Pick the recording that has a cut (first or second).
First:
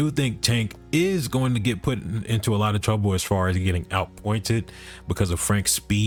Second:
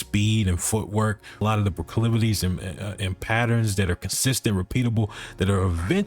second